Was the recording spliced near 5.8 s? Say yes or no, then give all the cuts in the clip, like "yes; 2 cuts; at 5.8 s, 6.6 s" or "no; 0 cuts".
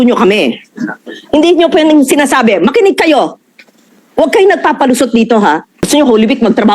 yes; 1 cut; at 5.8 s